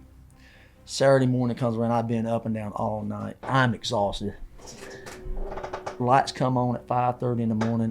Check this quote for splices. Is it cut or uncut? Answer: cut